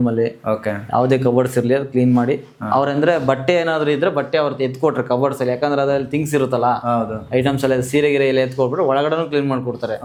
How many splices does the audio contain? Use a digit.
0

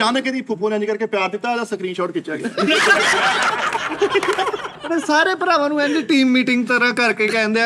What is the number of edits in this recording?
1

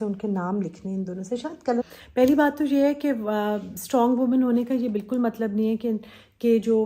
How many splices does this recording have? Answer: 1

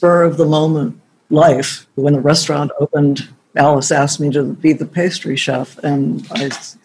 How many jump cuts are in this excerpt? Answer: 2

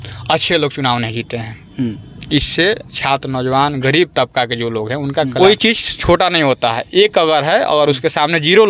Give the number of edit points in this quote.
1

